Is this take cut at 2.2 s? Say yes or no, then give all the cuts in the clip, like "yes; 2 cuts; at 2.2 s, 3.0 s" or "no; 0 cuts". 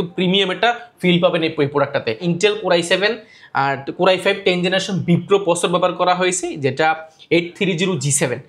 yes; 1 cut; at 2.2 s